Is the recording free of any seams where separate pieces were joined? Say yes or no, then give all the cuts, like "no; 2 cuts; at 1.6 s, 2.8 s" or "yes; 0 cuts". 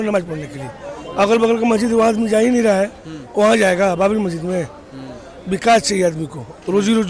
yes; 0 cuts